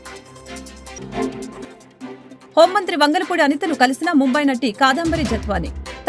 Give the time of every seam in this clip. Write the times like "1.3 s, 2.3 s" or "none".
1.0 s